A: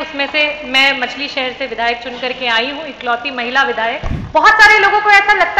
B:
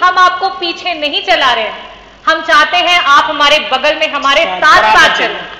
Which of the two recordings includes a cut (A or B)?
A